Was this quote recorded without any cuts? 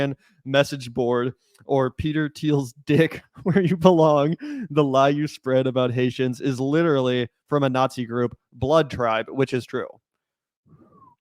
yes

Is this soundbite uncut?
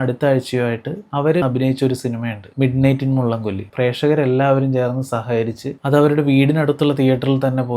no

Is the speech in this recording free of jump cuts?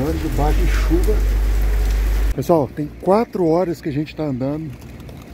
no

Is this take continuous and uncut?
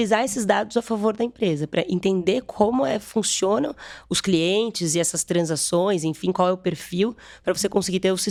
yes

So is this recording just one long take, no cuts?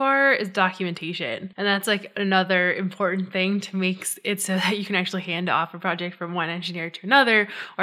no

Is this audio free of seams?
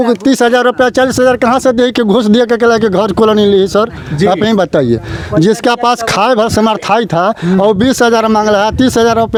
yes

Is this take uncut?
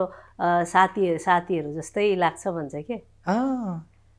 yes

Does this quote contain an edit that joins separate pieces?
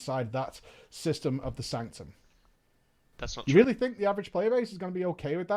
no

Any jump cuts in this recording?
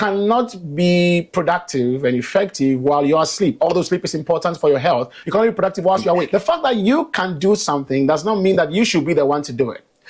yes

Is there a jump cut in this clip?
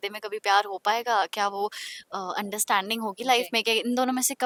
no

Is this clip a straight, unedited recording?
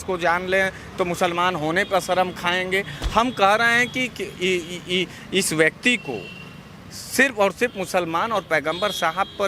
yes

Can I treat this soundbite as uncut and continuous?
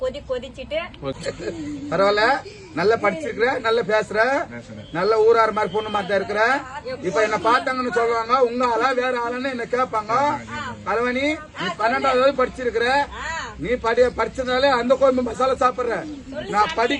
no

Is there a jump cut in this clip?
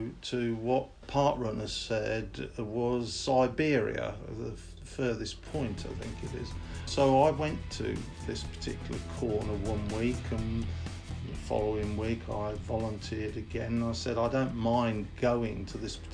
yes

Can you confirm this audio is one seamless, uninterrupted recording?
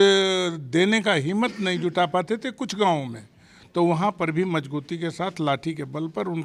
yes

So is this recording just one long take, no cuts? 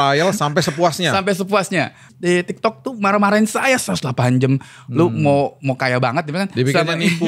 no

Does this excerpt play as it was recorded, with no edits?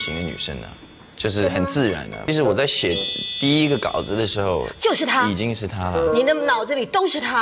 no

